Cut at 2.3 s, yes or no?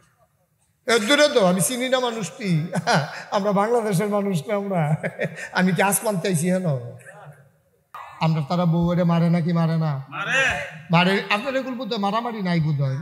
no